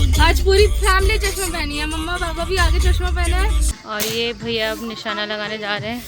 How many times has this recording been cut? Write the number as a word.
one